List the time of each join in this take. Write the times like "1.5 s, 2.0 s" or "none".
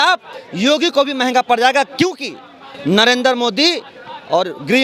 none